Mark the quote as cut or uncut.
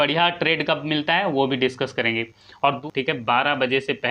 cut